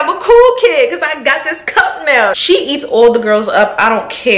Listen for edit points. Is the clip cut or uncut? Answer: cut